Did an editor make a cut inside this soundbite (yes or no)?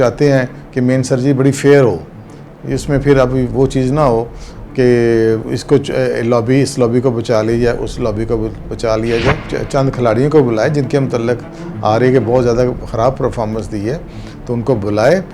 yes